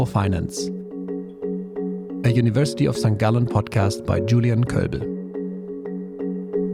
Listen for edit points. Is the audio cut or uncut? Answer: uncut